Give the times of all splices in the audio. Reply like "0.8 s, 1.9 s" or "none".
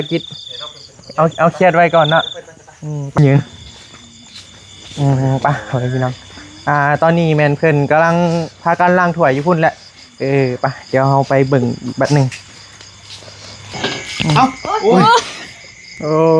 3.2 s, 13.7 s